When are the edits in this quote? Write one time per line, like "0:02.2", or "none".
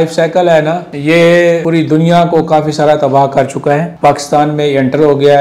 0:00.9
0:01.6
0:03.9